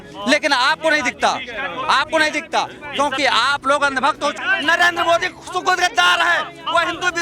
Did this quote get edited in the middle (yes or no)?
yes